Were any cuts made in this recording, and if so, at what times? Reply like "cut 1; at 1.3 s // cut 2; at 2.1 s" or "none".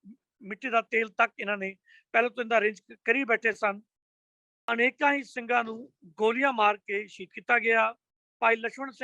cut 1; at 4.4 s